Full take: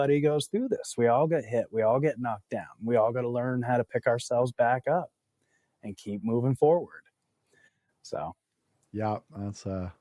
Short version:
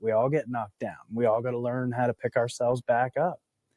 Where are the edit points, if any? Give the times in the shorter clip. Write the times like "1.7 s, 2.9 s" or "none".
none